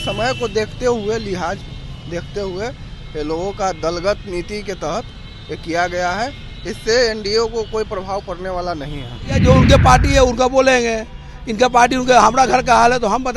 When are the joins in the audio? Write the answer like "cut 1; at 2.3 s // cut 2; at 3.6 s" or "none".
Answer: cut 1; at 9.4 s